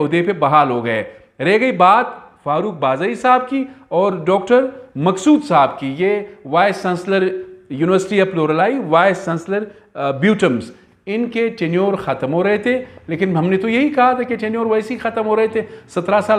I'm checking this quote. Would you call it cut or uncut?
uncut